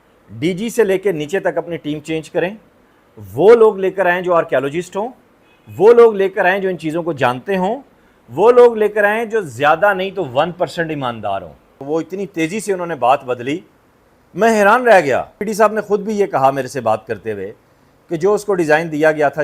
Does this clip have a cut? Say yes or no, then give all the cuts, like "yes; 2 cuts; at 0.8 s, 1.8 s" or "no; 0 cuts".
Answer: yes; 2 cuts; at 11.8 s, 15.4 s